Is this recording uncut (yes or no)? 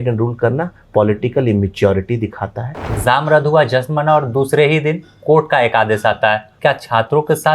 no